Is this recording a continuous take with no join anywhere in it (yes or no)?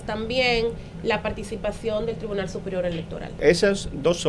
no